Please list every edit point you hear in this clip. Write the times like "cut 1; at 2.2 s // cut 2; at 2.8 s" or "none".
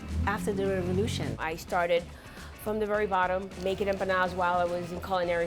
cut 1; at 1.3 s // cut 2; at 3.6 s